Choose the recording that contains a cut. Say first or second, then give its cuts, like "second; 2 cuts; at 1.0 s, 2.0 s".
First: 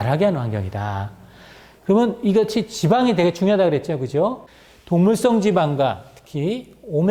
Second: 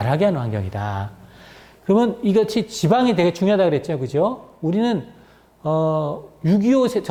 first; 1 cut; at 4.5 s